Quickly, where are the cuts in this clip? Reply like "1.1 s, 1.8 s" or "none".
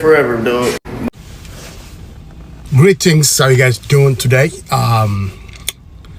1.1 s